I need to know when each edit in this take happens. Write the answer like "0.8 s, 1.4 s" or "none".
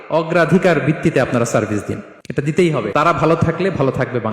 2.1 s, 2.9 s